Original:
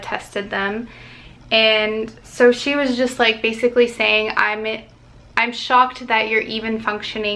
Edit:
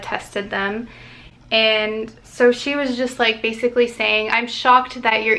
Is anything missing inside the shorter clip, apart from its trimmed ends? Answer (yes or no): yes